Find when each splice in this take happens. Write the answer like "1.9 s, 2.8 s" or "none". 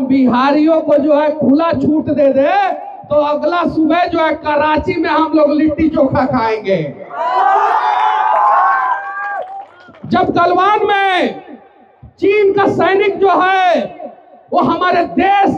none